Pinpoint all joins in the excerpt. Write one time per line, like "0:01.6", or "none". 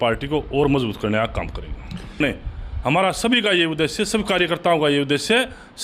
0:02.2